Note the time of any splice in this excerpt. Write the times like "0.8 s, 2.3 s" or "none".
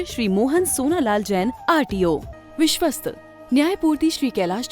2.3 s